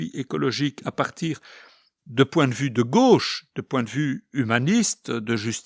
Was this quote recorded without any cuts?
yes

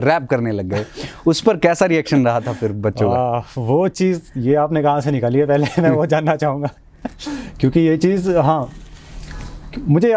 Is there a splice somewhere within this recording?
no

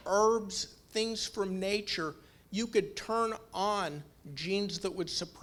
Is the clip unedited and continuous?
yes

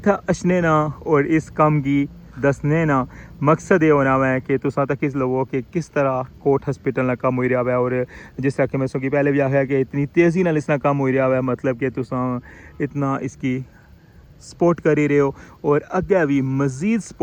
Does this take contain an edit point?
no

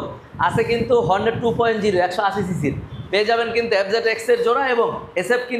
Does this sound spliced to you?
no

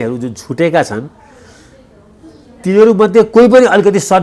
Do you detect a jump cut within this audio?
no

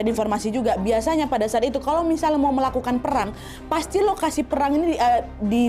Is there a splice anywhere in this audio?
no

